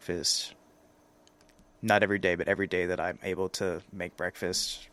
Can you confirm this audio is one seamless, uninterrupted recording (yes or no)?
yes